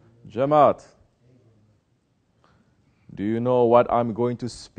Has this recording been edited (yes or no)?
yes